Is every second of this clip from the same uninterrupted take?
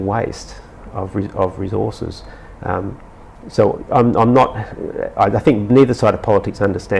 yes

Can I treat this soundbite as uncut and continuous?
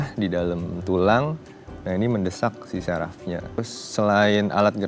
no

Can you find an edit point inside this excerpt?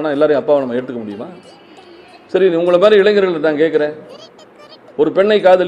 no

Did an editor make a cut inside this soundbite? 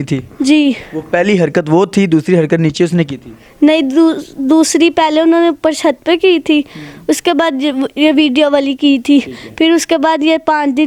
no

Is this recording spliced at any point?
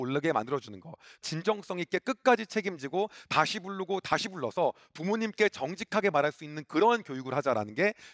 yes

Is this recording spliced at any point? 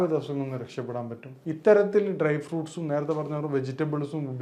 yes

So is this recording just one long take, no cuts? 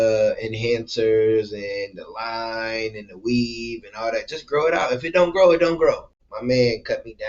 no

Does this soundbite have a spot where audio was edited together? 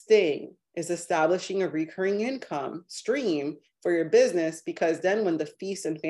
no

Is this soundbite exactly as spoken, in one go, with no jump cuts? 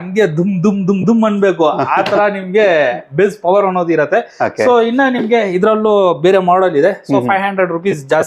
yes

